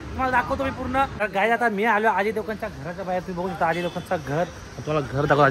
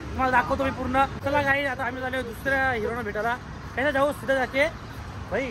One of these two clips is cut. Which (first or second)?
first